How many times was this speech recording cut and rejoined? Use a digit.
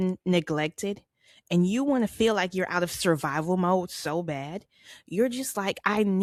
0